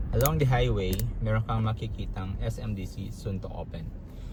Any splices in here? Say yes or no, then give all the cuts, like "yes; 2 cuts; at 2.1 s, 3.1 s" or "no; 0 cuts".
no; 0 cuts